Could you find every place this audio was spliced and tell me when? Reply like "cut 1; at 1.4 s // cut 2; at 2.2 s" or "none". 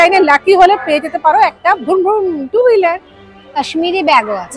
cut 1; at 3.6 s